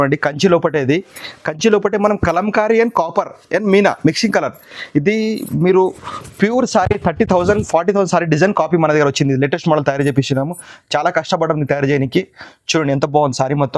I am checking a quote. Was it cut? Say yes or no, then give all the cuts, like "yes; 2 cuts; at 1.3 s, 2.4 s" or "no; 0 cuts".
no; 0 cuts